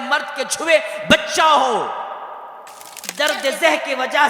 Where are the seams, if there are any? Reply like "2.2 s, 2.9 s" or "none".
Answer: 3.1 s